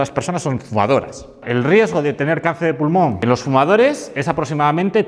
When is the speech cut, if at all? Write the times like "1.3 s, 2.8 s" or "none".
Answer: 1.4 s, 3.2 s